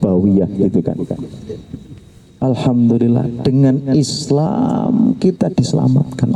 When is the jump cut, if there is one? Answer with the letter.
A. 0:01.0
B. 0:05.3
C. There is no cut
C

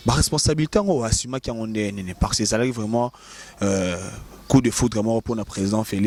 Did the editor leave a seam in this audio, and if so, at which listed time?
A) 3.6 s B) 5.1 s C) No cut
C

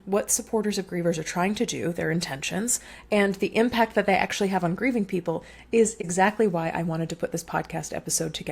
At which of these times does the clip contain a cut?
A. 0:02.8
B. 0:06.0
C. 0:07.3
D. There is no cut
B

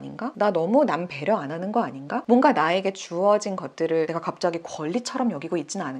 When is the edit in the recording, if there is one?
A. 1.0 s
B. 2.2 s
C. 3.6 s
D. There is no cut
B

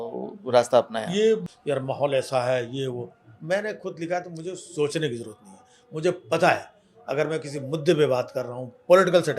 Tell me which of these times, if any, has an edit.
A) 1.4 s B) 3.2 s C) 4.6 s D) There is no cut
A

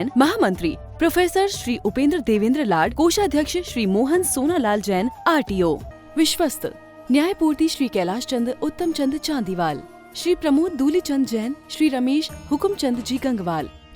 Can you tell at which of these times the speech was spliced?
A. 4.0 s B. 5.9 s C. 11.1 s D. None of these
B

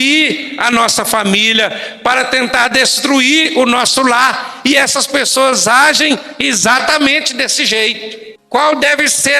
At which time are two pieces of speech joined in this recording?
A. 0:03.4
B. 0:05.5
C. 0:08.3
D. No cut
C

